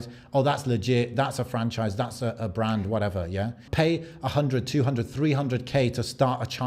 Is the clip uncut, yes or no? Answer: no